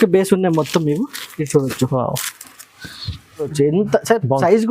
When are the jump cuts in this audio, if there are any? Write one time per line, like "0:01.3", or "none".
0:03.5